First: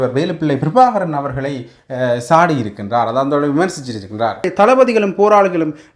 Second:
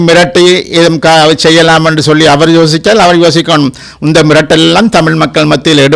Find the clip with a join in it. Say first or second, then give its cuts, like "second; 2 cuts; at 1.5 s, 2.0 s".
first; 1 cut; at 4.5 s